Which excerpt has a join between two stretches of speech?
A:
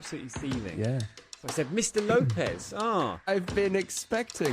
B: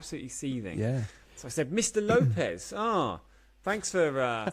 A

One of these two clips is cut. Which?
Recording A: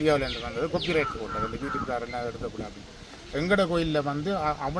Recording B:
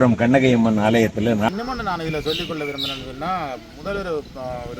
B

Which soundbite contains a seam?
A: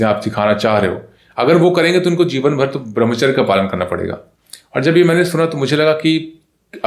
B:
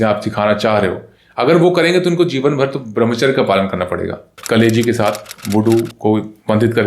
B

